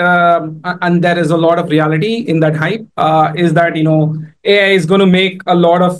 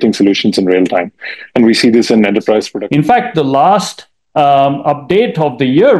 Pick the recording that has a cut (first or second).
second